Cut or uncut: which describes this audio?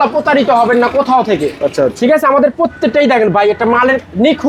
uncut